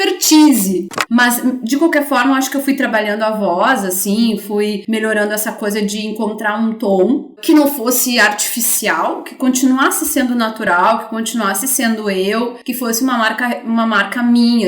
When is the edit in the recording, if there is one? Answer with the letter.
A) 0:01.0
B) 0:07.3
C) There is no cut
A